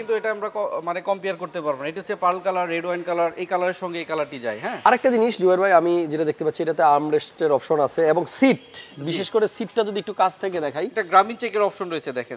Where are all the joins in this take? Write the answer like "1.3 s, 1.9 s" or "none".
none